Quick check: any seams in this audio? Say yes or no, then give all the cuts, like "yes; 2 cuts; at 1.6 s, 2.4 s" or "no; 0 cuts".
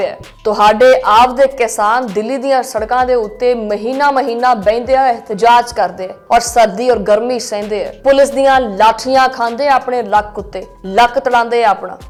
no; 0 cuts